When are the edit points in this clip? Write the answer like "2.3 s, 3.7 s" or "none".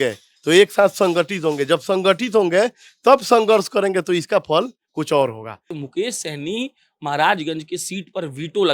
5.8 s